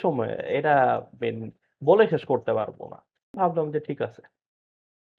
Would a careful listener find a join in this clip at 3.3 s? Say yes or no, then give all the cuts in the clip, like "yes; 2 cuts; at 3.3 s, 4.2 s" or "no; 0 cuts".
yes; 1 cut; at 3.3 s